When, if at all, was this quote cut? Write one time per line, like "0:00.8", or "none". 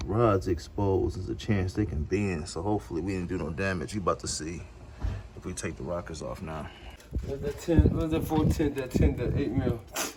none